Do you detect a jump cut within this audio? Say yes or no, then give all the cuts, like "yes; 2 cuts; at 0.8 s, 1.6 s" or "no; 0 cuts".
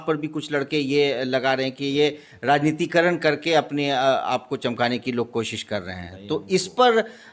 no; 0 cuts